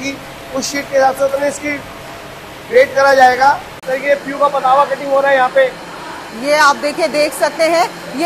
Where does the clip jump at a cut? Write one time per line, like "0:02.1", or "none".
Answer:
0:03.8